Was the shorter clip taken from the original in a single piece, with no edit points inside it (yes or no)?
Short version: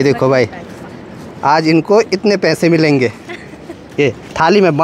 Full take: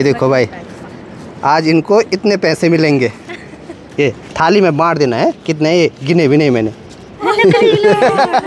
yes